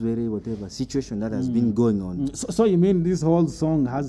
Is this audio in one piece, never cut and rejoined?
yes; 0 cuts

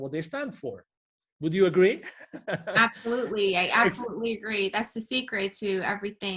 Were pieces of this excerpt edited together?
no; 0 cuts

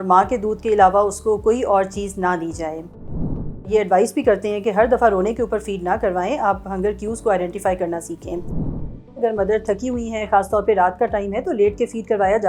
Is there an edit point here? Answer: yes; 2 cuts; at 3.1 s, 8.8 s

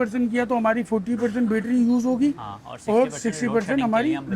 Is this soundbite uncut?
yes; 0 cuts

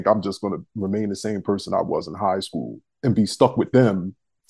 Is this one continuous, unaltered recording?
yes; 0 cuts

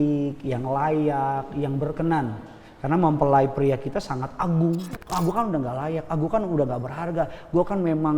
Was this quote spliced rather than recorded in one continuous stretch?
yes; 1 cut; at 4.9 s

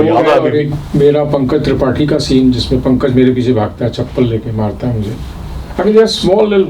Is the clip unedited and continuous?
yes; 0 cuts

